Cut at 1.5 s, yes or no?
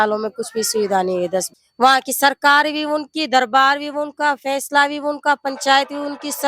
yes